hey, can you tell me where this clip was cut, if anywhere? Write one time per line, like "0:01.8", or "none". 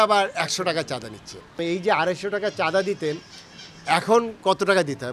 0:01.6